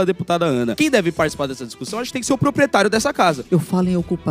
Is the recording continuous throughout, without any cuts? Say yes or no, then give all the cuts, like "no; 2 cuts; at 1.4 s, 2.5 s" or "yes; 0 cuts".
no; 1 cut; at 3.4 s